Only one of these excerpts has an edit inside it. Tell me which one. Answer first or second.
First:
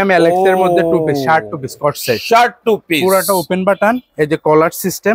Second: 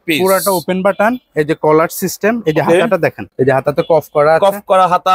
second